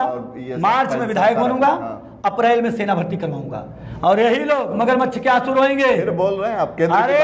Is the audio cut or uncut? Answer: uncut